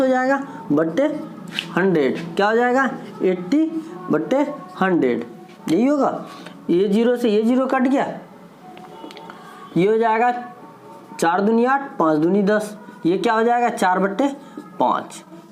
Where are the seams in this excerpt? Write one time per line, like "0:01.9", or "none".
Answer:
none